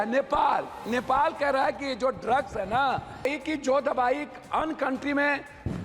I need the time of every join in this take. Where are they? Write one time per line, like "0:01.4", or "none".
0:03.3